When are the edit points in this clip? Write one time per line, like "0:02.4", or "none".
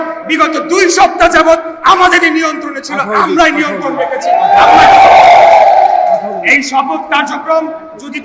none